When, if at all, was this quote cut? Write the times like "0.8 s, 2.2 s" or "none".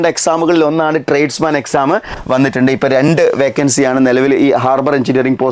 2.1 s

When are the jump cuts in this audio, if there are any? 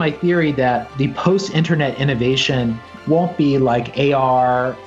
0.9 s

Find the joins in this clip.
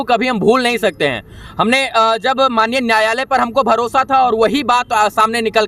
none

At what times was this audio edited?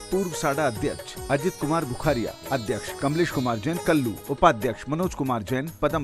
2.9 s, 4.2 s

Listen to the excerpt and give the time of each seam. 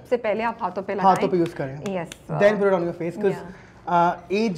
none

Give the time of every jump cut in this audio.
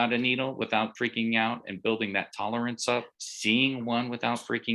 0.9 s

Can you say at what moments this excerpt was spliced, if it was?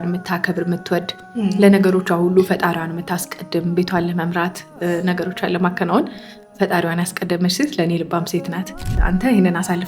8.9 s

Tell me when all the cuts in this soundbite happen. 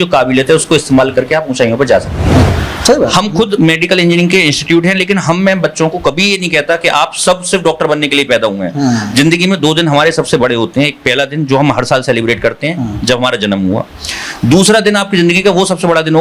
2.4 s

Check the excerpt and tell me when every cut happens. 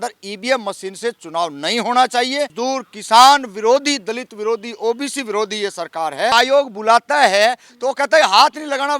2.5 s, 6.3 s

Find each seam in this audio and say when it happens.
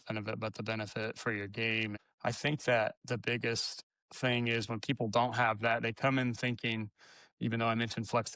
2.1 s

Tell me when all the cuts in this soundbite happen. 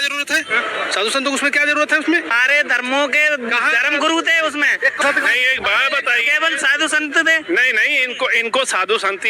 2.3 s, 5.0 s

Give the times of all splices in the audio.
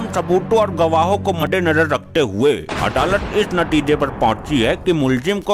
1.4 s

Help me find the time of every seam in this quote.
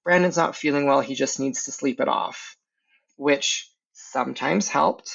none

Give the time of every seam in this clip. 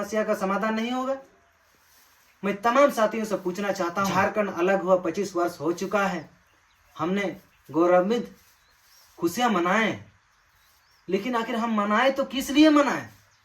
4.1 s

